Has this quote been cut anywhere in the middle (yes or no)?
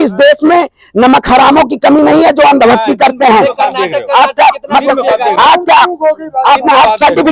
no